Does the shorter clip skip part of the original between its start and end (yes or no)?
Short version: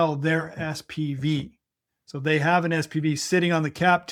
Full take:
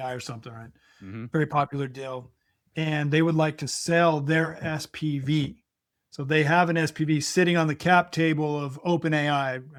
no